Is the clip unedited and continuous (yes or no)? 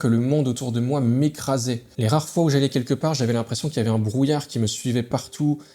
yes